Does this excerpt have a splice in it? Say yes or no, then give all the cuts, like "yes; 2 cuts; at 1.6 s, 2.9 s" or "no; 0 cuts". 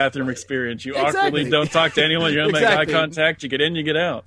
no; 0 cuts